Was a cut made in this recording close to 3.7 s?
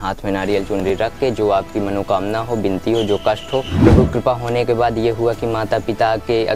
yes; 1 cut; at 3.7 s

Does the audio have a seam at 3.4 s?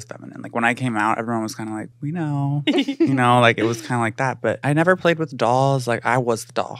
no; 2 cuts; at 1.9 s, 4.6 s

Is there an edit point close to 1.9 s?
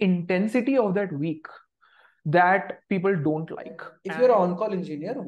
no; 1 cut; at 3.9 s

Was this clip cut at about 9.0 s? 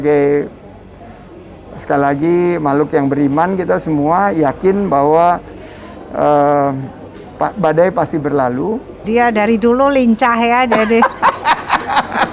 yes; 1 cut; at 9.0 s

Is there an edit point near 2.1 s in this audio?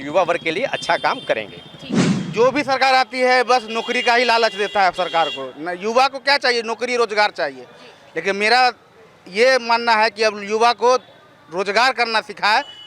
yes; 1 cut; at 2.1 s

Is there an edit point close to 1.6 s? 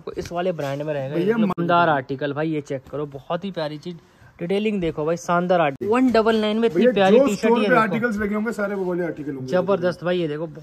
yes; 2 cuts; at 1.6 s, 5.8 s

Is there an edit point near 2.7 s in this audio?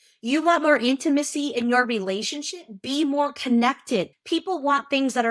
no; 1 cut; at 4.1 s

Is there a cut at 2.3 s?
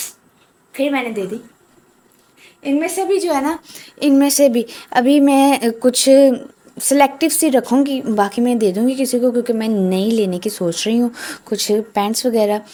no; 0 cuts

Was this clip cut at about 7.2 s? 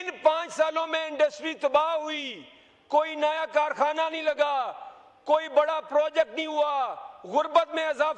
no; 0 cuts

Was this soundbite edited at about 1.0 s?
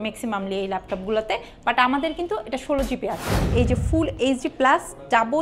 no; 1 cut; at 3.5 s

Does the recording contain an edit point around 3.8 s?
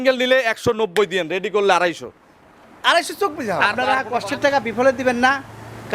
yes; 1 cut; at 3.8 s

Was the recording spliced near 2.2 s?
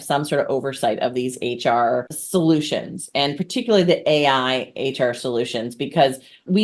yes; 1 cut; at 2.2 s

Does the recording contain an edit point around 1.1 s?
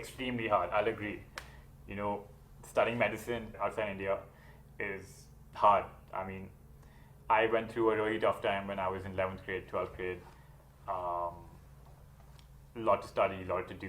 no; 1 cut; at 3.5 s

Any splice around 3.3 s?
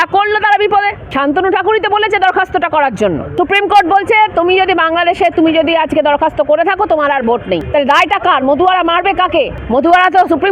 yes; 4 cuts; at 1.0 s, 3.3 s, 7.6 s, 9.6 s

